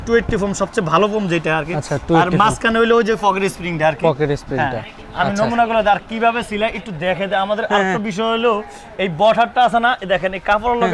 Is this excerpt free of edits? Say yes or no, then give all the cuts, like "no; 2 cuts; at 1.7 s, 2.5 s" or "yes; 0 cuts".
yes; 0 cuts